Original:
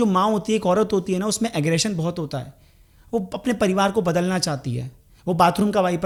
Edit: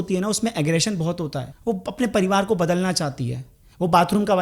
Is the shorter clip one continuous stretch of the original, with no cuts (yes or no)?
no